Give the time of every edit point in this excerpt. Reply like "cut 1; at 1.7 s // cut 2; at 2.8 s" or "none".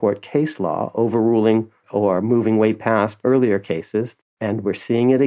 cut 1; at 1.8 s // cut 2; at 3.2 s // cut 3; at 4.2 s